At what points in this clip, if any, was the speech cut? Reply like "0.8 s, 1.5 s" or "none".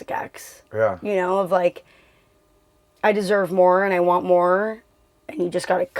none